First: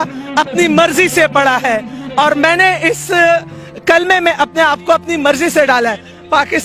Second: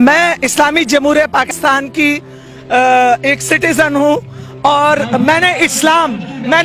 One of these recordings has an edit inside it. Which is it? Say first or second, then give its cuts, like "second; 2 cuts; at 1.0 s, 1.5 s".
second; 1 cut; at 1.5 s